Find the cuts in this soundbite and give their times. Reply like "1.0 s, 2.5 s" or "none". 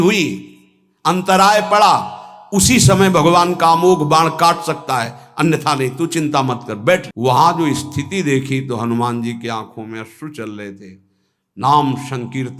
7.1 s